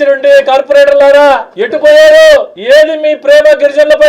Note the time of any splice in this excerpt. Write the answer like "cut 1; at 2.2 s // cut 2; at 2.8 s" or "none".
cut 1; at 1.6 s // cut 2; at 2.5 s